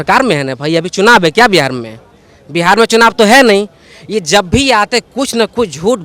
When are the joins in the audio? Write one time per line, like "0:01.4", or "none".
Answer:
none

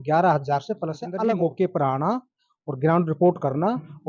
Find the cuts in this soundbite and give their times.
0:01.1

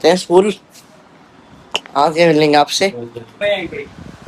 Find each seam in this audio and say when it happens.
0:03.4

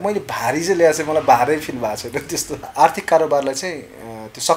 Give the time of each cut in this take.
0:02.7

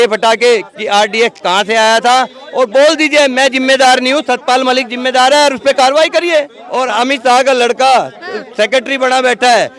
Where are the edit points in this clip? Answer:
0:06.6

